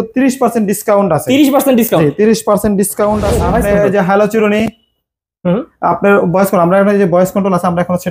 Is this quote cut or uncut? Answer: cut